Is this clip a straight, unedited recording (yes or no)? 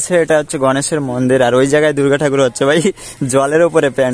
yes